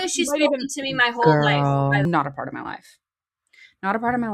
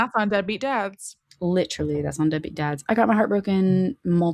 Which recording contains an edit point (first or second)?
first